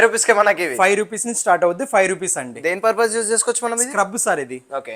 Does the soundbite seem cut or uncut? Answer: uncut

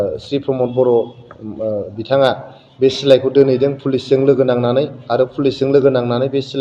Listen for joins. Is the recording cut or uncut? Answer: uncut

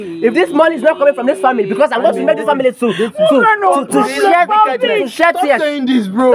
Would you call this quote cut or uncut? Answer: uncut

